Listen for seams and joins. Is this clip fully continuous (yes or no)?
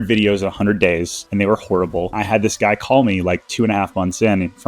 no